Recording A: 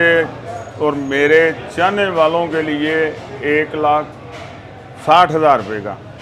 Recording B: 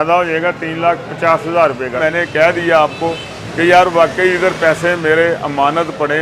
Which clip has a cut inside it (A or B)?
B